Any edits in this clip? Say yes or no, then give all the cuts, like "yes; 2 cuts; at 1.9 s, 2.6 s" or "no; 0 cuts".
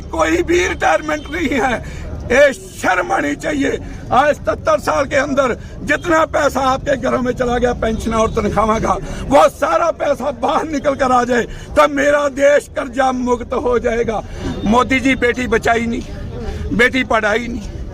yes; 1 cut; at 14.4 s